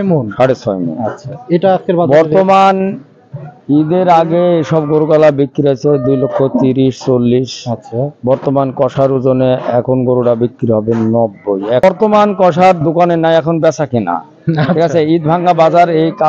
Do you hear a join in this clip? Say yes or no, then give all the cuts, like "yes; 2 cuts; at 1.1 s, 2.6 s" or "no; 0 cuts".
yes; 1 cut; at 11.8 s